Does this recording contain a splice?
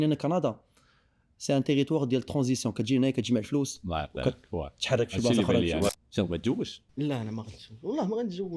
yes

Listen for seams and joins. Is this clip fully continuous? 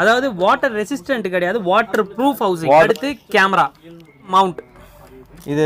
no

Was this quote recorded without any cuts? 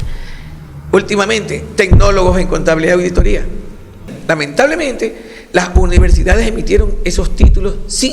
no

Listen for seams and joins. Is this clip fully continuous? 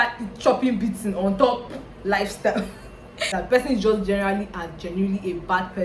no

